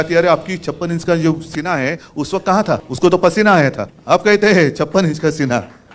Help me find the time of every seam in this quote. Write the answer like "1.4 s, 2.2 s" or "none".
2.9 s, 3.9 s